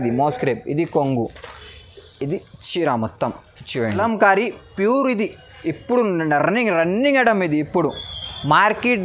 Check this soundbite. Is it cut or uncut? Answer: cut